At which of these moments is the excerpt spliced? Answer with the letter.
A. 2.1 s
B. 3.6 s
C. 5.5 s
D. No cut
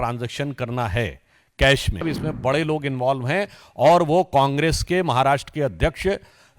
A